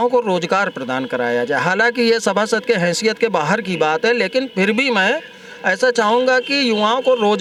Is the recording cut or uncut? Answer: uncut